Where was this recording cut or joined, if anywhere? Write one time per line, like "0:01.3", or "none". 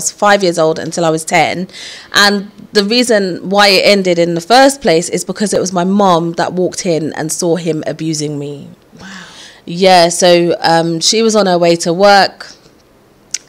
none